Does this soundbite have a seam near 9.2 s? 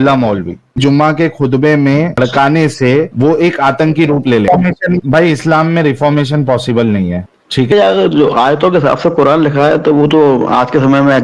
no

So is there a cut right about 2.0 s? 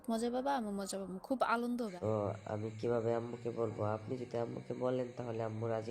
yes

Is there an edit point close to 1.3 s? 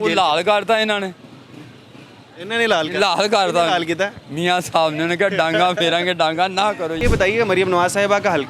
no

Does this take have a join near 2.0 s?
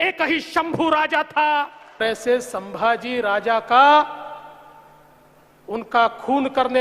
yes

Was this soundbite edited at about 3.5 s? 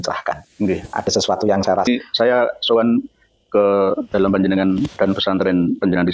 no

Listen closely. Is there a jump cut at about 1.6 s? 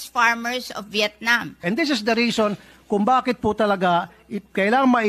yes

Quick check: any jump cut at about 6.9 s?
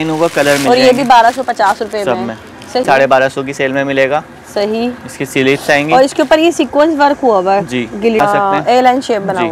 no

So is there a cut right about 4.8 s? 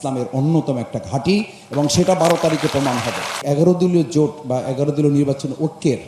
no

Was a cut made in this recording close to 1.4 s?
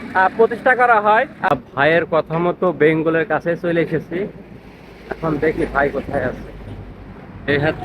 yes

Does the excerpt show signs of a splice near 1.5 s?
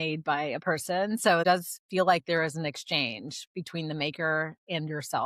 yes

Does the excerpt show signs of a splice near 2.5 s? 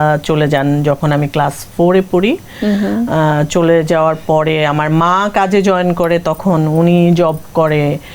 no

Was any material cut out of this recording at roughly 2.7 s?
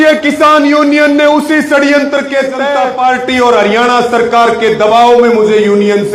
yes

